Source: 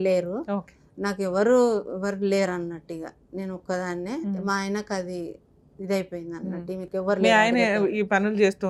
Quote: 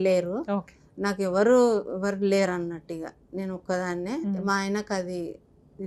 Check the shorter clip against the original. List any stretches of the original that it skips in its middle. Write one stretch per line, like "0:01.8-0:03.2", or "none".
none

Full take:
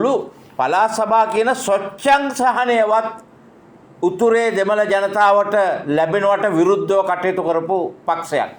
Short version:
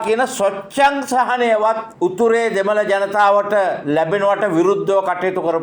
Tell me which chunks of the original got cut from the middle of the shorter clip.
0:03.1-0:03.9

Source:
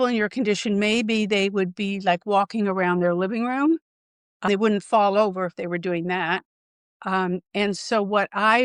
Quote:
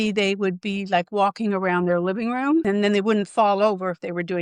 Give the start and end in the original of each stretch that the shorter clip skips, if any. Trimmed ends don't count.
0:03.9-0:04.3

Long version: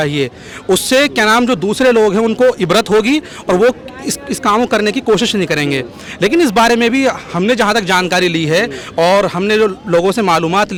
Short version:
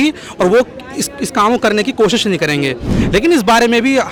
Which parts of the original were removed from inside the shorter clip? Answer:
none

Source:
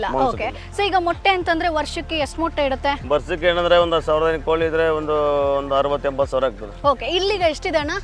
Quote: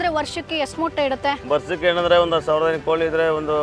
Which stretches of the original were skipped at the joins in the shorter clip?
none

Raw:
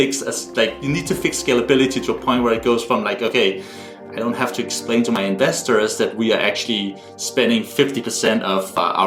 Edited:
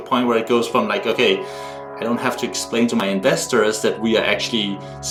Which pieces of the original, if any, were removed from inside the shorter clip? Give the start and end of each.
none

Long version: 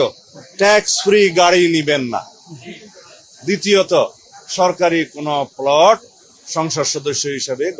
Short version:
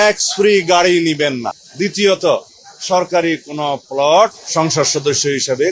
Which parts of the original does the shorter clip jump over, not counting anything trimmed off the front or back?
0:02.3-0:03.3
0:06.1-0:06.4

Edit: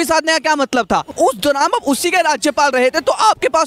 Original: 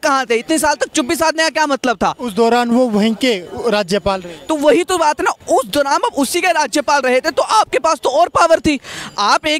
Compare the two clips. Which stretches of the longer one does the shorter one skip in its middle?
0:02.2-0:05.4

